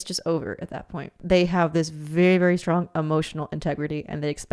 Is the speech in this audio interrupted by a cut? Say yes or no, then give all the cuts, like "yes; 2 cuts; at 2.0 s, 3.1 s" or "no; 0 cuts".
yes; 1 cut; at 1.2 s